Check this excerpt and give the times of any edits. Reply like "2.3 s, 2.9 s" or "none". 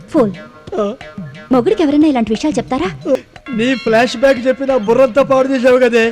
3.2 s